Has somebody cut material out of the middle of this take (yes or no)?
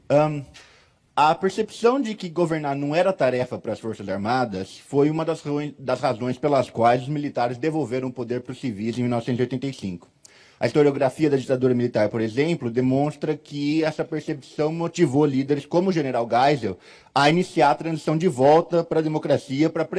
no